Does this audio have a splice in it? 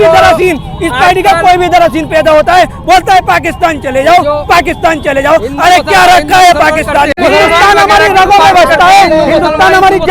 yes; 1 cut; at 7.1 s

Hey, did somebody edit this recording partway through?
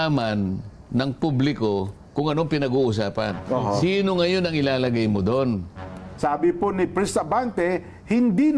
yes; 1 cut; at 6.0 s

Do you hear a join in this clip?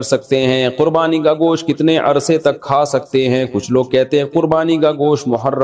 no; 0 cuts

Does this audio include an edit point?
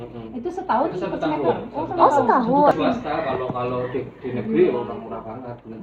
yes; 1 cut; at 2.7 s

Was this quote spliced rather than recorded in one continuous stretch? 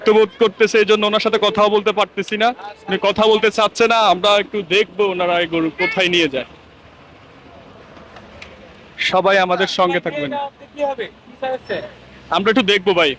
no; 0 cuts

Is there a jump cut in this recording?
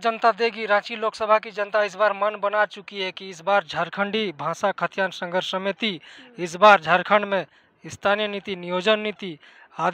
no; 0 cuts

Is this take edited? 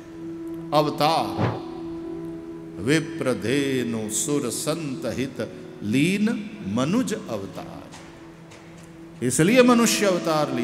no; 0 cuts

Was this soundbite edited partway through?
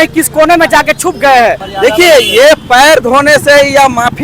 yes; 1 cut; at 1.7 s

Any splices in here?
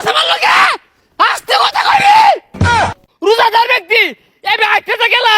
yes; 1 cut; at 2.8 s

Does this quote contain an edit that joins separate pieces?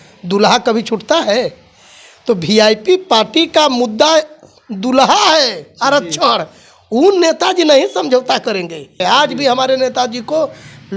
yes; 1 cut; at 9.0 s

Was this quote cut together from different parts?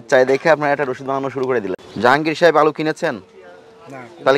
yes; 1 cut; at 1.8 s

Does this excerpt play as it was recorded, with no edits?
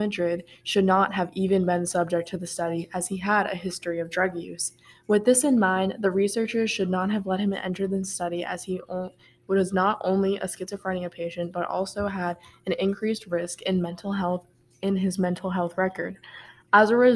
yes; 0 cuts

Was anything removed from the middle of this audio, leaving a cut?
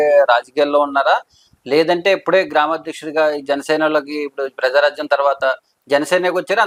no; 0 cuts

